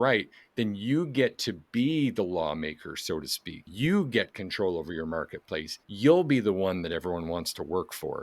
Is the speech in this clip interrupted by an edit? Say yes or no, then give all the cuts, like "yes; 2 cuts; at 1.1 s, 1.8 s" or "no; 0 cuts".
yes; 2 cuts; at 3.7 s, 5.8 s